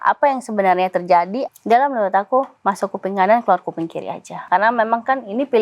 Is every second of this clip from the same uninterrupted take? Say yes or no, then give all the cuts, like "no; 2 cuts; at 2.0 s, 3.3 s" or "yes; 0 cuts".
no; 2 cuts; at 1.4 s, 4.5 s